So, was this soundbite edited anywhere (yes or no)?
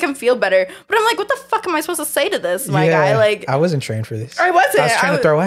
no